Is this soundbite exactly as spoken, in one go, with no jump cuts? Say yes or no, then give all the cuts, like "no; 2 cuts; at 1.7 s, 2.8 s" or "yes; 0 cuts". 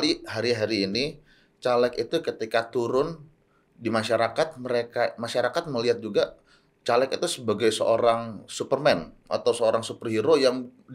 yes; 0 cuts